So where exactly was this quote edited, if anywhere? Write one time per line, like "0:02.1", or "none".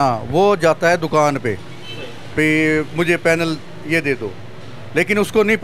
none